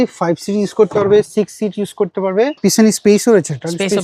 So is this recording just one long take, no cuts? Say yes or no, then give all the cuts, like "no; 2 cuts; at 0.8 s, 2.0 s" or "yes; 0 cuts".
no; 1 cut; at 2.6 s